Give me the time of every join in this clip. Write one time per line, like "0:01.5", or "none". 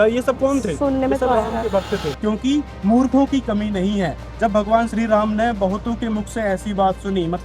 0:02.1